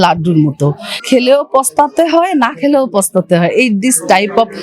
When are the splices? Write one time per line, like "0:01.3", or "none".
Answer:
0:01.0

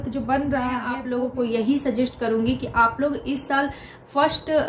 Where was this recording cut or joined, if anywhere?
0:00.9

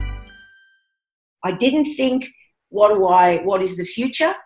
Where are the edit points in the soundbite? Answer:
0:01.3

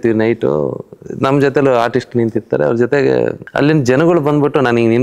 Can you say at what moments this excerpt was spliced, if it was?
0:03.4

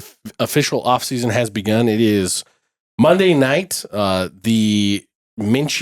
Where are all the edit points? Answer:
none

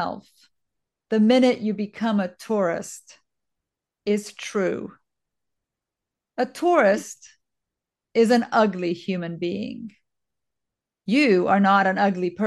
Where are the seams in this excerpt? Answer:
none

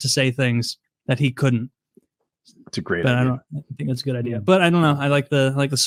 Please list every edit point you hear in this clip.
none

